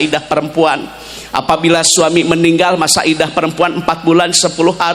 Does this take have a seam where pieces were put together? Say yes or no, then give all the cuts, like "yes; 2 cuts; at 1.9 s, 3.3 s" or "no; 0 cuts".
no; 0 cuts